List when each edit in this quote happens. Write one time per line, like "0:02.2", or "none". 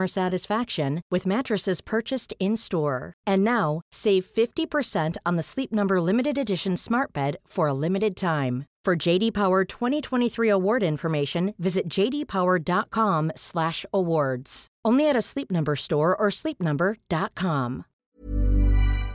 0:18.0